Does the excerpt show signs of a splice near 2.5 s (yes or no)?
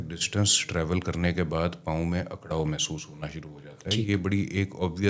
no